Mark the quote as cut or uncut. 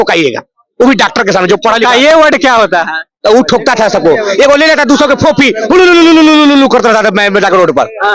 uncut